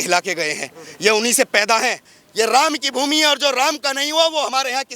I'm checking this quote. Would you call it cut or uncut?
cut